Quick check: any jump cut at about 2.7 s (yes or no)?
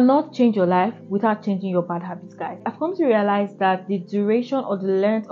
yes